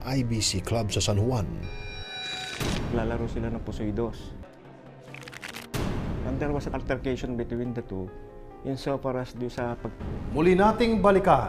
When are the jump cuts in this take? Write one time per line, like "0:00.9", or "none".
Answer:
none